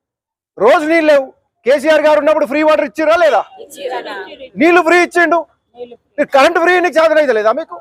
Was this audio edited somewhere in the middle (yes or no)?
no